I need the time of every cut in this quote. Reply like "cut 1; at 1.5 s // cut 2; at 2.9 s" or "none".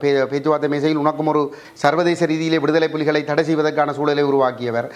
cut 1; at 1.6 s